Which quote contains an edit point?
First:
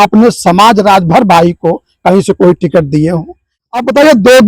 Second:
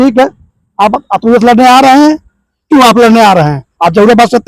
first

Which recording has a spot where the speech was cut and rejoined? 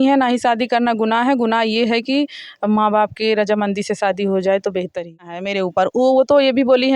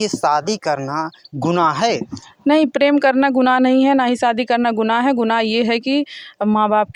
first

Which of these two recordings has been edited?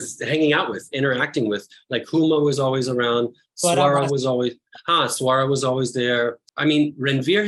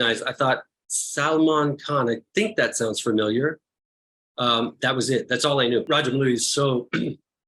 second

